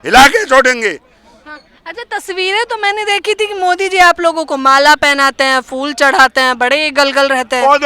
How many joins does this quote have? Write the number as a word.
zero